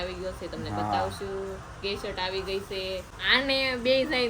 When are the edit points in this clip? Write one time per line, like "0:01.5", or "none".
0:03.1